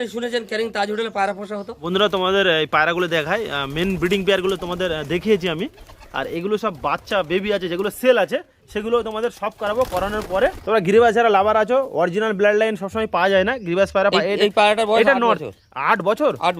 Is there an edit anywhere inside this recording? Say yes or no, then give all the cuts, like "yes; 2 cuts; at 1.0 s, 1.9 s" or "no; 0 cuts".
yes; 2 cuts; at 1.8 s, 10.6 s